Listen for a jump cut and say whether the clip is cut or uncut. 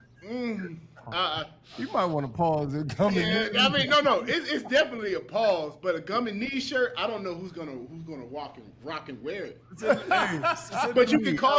uncut